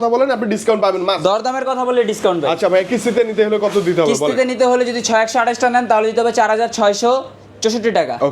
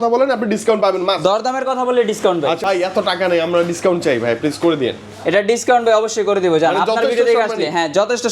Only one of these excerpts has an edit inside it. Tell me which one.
second; 1 cut; at 2.6 s

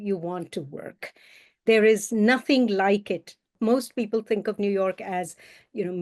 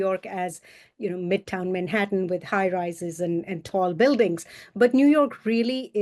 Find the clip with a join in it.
first; 1 cut; at 3.5 s

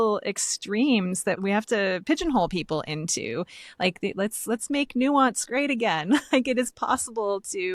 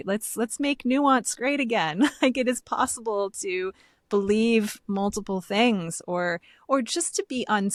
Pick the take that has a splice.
first; 1 cut; at 1.4 s

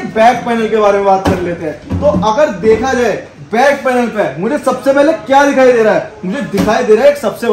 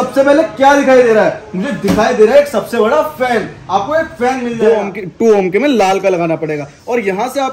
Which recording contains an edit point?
second; 1 cut; at 4.5 s

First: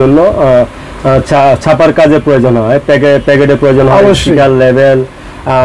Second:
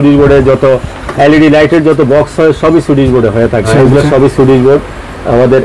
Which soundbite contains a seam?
second; 1 cut; at 3.7 s

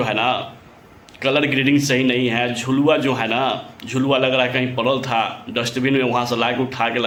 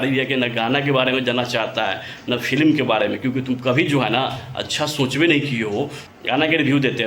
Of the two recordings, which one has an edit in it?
second; 1 cut; at 6.0 s

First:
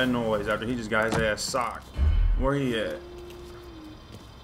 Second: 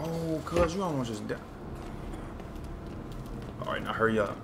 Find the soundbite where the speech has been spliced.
first; 1 cut; at 1.8 s

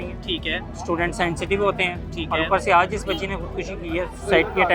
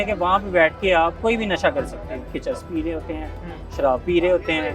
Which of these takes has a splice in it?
second; 2 cuts; at 1.2 s, 2.3 s

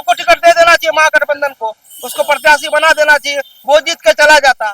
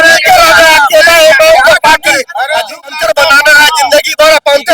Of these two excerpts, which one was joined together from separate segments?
second; 1 cut; at 2.8 s

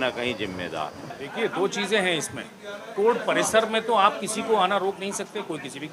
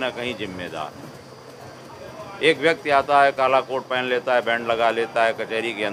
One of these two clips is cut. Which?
first; 1 cut; at 1.2 s

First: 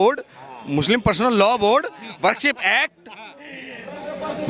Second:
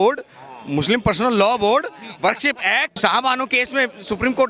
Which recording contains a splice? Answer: second; 1 cut; at 2.9 s

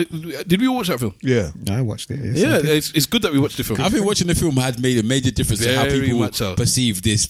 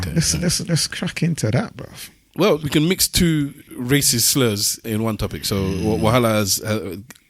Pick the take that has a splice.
second; 3 cuts; at 2.6 s, 3.6 s, 4.8 s

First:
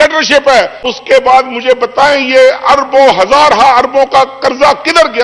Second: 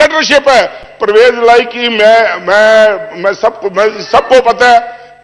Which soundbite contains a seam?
first; 1 cut; at 0.9 s

